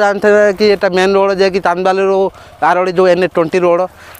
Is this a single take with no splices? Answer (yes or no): yes